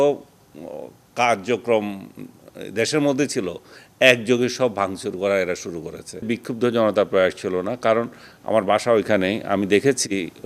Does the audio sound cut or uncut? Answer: cut